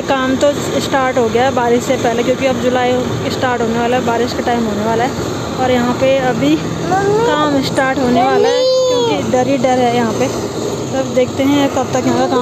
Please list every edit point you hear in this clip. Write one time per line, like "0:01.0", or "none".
none